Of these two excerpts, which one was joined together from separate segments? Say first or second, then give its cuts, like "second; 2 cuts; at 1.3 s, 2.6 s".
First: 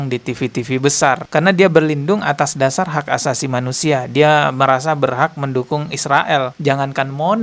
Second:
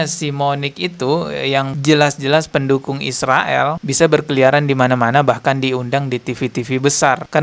first; 1 cut; at 6.5 s